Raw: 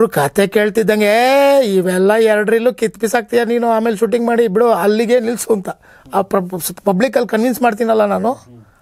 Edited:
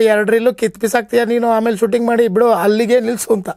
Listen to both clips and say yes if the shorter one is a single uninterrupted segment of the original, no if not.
yes